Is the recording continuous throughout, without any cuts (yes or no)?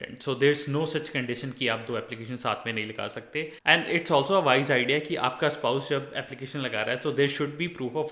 no